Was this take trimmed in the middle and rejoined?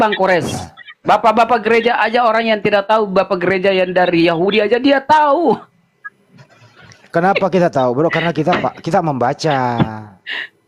no; 0 cuts

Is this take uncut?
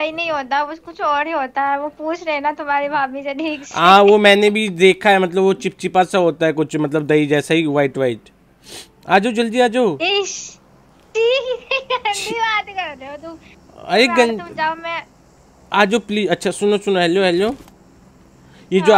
yes; 0 cuts

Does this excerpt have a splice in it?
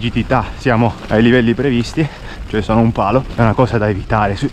yes; 2 cuts; at 1.0 s, 3.3 s

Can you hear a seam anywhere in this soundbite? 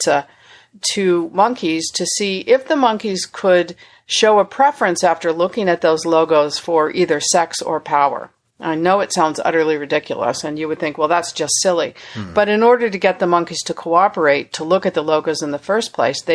no; 0 cuts

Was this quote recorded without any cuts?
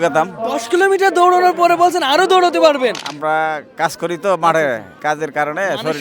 no; 2 cuts; at 3.1 s, 4.9 s

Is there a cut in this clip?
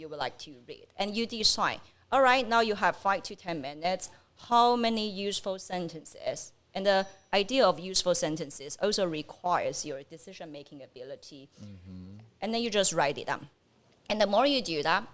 no; 0 cuts

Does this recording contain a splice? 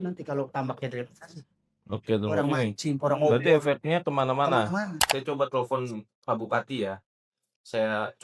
yes; 1 cut; at 5.1 s

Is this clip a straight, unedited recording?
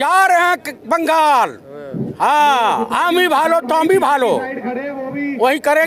yes; 0 cuts

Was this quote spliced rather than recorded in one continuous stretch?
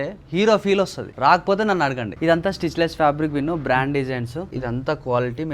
yes; 1 cut; at 4.5 s

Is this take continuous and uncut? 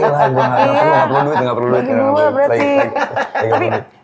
yes; 0 cuts

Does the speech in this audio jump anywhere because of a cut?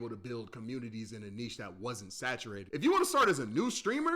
yes; 1 cut; at 2.5 s

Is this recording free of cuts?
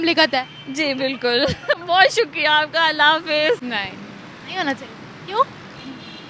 yes; 0 cuts

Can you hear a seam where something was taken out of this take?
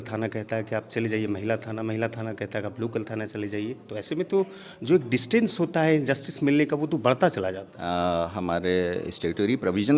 yes; 1 cut; at 7.7 s

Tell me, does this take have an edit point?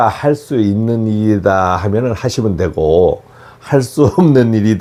no; 0 cuts

